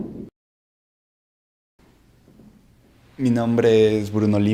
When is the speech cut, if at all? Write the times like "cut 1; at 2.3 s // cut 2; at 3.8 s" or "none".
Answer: none